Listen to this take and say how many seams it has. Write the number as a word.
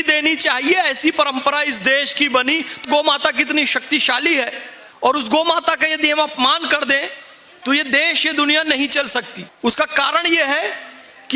two